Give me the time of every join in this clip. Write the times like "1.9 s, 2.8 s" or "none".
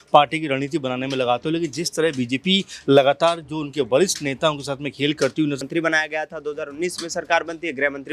5.6 s